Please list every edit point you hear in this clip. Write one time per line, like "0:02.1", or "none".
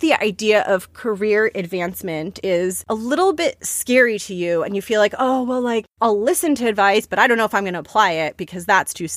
0:02.4
0:05.9